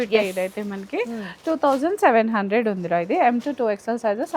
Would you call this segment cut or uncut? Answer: uncut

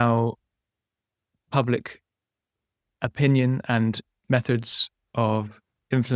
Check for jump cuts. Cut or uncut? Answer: uncut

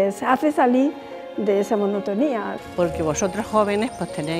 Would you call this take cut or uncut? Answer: cut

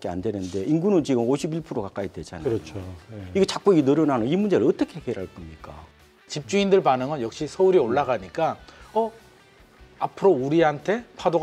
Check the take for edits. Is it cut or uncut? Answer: cut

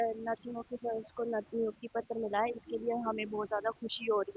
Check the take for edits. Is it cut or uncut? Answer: uncut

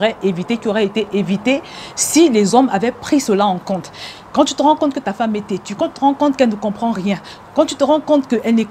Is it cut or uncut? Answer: uncut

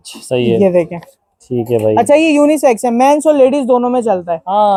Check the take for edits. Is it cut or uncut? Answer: uncut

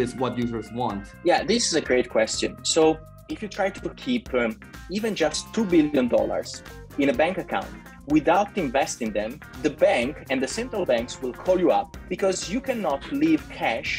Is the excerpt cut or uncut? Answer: cut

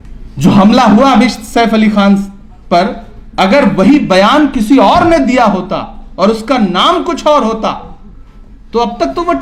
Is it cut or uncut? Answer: uncut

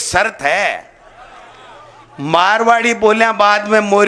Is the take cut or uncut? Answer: uncut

